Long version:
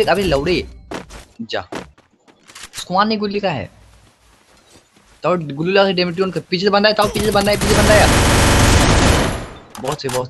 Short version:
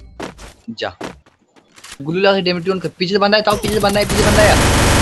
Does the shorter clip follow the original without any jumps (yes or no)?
no